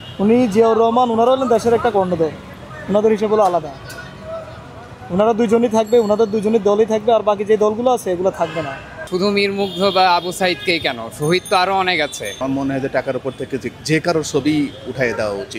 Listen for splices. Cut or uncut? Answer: cut